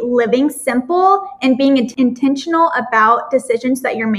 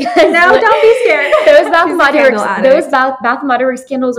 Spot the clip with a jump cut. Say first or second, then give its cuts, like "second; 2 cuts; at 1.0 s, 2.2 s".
first; 1 cut; at 1.9 s